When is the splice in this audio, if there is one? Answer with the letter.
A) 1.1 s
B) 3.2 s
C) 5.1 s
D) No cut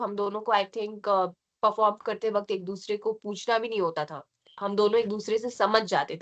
D